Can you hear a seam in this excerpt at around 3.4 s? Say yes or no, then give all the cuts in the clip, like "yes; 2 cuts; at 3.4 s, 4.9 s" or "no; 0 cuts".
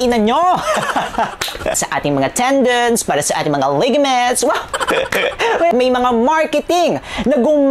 no; 2 cuts; at 1.8 s, 5.7 s